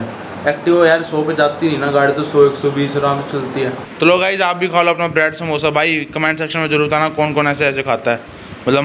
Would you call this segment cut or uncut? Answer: cut